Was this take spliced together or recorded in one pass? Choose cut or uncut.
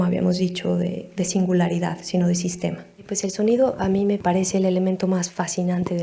cut